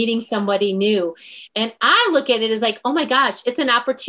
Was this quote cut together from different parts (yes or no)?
yes